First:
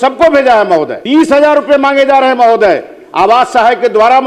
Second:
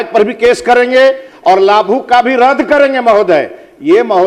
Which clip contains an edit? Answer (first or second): first